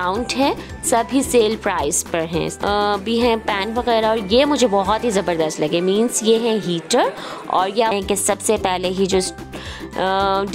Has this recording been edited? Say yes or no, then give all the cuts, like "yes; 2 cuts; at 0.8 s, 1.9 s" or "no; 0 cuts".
yes; 2 cuts; at 2.5 s, 7.9 s